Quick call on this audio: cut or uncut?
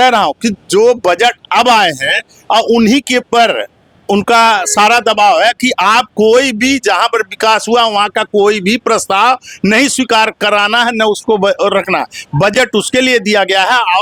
uncut